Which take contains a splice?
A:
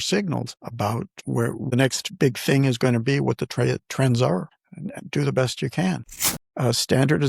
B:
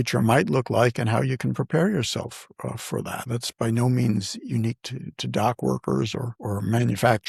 A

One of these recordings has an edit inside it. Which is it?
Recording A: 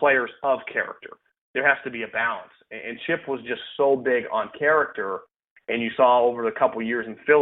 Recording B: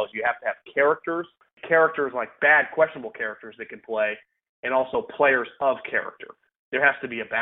B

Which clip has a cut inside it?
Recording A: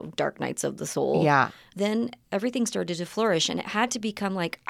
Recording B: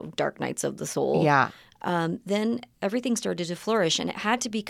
A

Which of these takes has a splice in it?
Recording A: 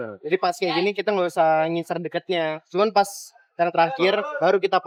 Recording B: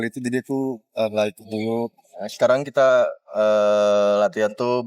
B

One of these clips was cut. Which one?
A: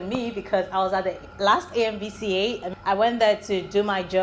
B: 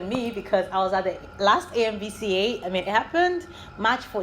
A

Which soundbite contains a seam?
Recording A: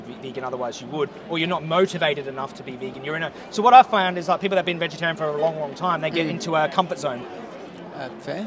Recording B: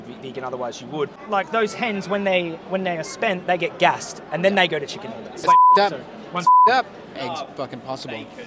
B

